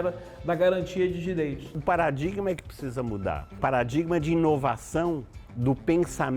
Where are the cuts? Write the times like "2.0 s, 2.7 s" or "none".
1.7 s, 3.5 s